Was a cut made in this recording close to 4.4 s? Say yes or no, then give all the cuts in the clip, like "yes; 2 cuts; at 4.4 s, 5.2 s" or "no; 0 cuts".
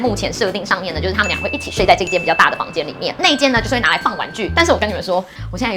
yes; 1 cut; at 4.4 s